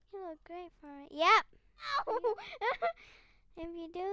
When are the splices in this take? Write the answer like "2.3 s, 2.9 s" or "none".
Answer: 1.9 s